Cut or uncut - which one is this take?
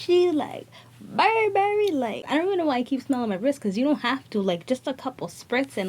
cut